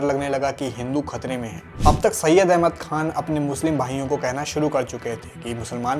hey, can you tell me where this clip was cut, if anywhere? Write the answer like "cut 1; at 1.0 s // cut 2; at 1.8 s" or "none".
cut 1; at 1.6 s

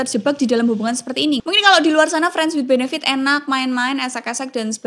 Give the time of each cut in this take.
cut 1; at 1.4 s

